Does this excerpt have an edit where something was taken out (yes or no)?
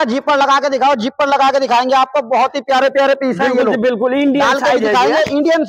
no